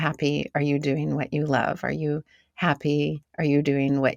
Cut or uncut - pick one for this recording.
cut